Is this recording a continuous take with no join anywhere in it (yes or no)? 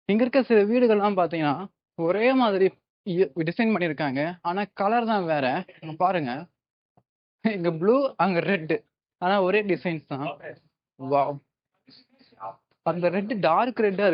yes